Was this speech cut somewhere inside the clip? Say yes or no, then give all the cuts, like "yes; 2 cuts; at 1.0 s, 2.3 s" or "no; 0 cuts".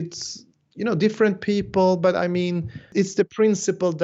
yes; 1 cut; at 2.8 s